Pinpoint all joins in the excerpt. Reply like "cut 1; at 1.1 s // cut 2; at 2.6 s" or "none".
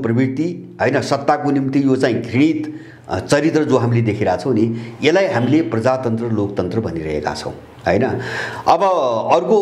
none